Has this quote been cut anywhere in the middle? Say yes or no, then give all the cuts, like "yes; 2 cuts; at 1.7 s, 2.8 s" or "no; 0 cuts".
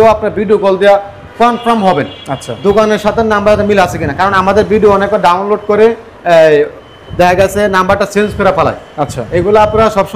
no; 0 cuts